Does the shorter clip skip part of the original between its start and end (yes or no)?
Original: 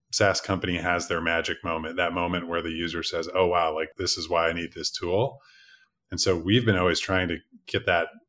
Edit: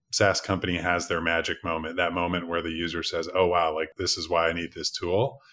no